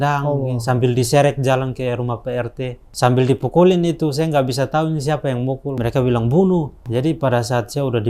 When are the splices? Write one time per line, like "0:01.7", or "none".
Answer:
0:02.8
0:05.8
0:06.8